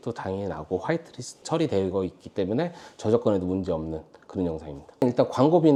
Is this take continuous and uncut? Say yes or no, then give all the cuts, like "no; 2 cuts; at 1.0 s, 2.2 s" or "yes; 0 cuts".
yes; 0 cuts